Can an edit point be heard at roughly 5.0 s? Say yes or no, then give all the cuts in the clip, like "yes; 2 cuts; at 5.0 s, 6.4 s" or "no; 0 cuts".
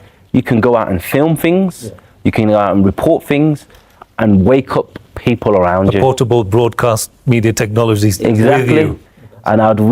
no; 1 cut; at 9.0 s